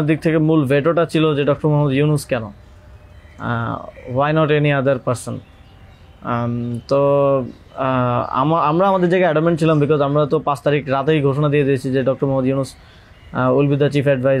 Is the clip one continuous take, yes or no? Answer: yes